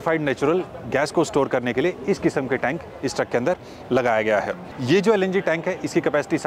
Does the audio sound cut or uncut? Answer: cut